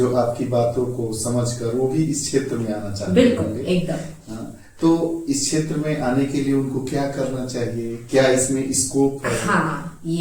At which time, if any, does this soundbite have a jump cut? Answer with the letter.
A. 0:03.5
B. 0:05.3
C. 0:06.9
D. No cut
D